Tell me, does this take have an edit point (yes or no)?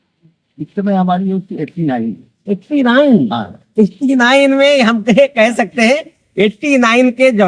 no